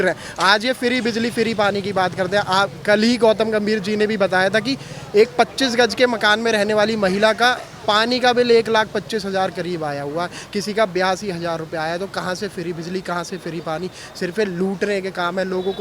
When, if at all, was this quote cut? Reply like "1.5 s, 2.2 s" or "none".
none